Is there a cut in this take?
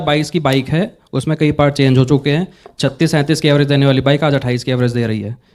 no; 0 cuts

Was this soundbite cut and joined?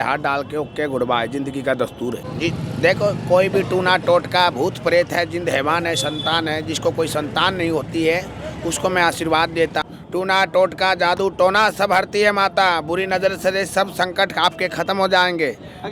yes; 2 cuts; at 2.3 s, 9.8 s

